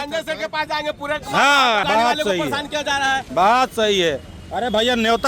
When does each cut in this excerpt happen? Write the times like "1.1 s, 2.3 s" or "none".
1.8 s